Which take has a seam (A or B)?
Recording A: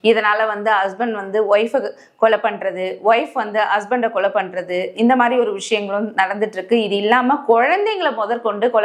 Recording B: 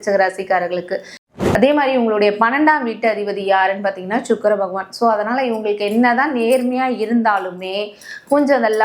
B